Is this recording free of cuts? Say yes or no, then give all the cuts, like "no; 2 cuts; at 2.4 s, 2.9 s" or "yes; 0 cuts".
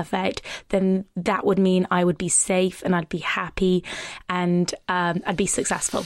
yes; 0 cuts